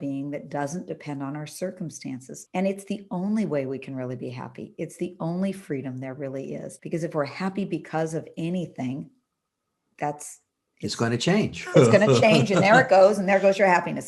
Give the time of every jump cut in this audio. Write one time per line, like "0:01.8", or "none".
0:02.4
0:06.8